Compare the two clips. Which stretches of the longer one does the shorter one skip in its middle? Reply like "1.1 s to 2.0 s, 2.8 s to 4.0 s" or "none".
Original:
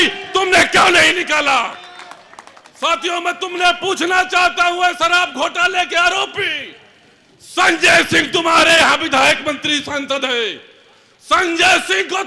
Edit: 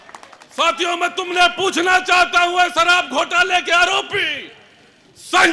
none